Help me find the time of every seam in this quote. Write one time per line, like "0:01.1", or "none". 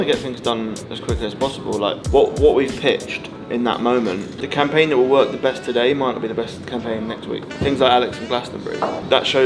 none